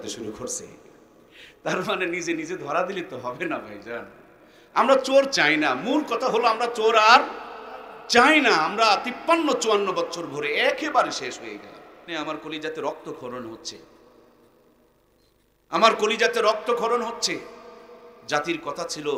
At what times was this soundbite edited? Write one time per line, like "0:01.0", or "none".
0:12.1